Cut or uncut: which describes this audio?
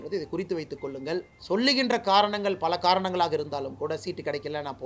cut